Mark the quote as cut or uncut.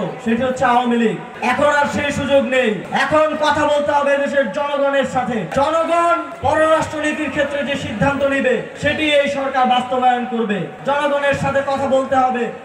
cut